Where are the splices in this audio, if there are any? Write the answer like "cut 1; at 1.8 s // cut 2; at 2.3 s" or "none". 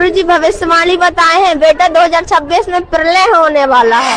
none